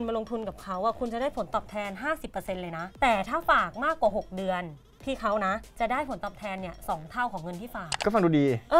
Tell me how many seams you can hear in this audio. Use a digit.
2